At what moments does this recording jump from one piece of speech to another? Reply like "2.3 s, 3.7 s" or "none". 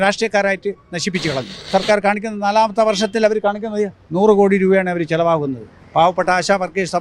1.6 s